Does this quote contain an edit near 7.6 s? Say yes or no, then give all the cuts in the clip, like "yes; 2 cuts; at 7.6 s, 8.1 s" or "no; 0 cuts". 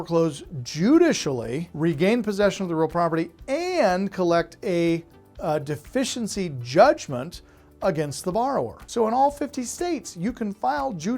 no; 2 cuts; at 1.6 s, 8.8 s